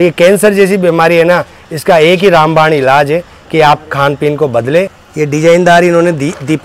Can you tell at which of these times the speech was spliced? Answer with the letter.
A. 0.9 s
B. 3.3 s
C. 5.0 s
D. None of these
C